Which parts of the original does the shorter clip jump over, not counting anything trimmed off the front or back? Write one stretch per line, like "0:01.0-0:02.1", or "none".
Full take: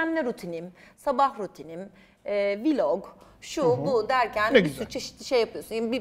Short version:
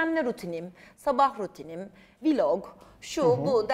0:02.2-0:02.6